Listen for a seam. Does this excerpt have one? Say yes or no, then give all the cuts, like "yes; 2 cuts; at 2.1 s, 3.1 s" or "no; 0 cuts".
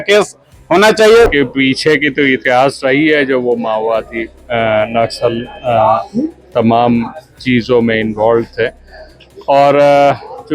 yes; 1 cut; at 1.3 s